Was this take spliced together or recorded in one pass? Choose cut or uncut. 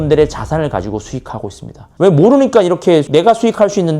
cut